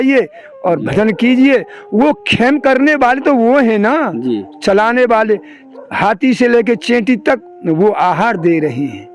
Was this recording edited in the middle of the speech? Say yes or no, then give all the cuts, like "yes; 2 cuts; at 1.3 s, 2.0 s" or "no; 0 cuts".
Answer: no; 0 cuts